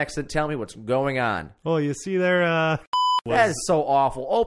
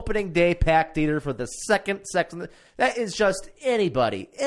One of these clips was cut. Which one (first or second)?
first